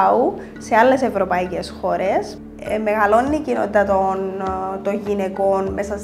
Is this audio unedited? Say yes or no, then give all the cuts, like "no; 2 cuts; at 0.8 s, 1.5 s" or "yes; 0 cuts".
no; 1 cut; at 2.4 s